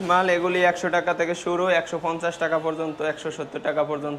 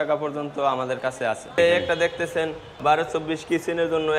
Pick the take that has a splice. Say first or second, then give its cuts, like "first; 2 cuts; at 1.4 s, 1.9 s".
second; 2 cuts; at 1.6 s, 2.8 s